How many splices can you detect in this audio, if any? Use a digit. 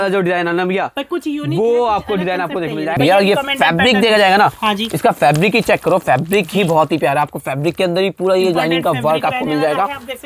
1